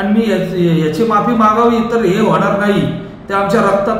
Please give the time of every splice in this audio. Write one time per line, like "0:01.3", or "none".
none

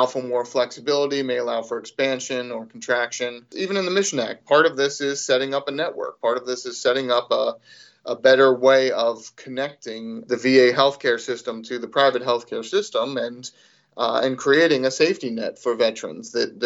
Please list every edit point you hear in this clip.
0:03.5
0:04.4
0:10.2

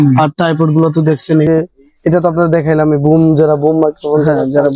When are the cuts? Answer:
0:01.5

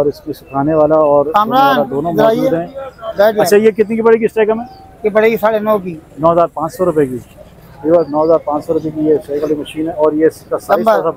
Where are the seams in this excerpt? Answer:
none

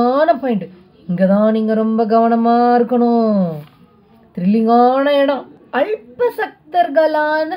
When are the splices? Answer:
0:05.6

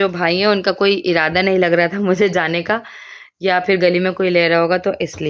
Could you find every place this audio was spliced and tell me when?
none

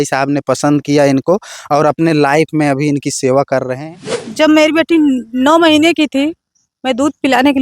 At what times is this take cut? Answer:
0:03.8

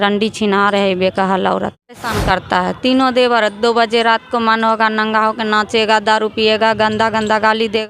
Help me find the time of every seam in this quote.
0:02.1

